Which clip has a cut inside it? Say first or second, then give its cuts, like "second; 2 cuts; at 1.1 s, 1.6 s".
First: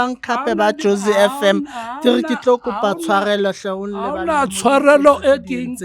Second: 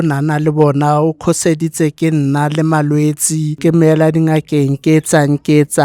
second; 1 cut; at 3.5 s